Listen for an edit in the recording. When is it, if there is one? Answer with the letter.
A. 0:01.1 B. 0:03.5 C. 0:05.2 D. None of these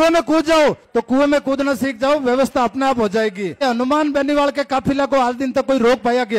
B